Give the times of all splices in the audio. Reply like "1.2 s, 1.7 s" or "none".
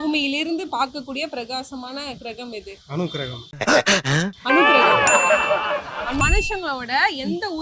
6.2 s